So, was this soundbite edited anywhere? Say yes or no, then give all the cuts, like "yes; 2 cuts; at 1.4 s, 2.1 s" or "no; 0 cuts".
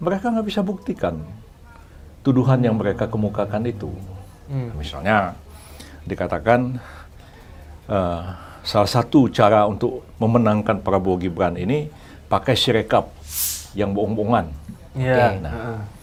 no; 0 cuts